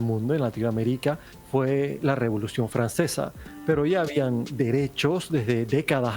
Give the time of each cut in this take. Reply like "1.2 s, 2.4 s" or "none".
1.3 s, 3.4 s